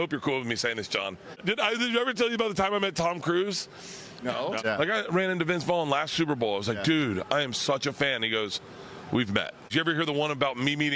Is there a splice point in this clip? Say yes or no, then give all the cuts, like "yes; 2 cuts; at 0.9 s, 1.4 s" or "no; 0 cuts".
yes; 3 cuts; at 1.4 s, 4.6 s, 9.7 s